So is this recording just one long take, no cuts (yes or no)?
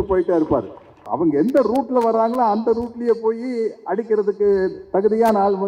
no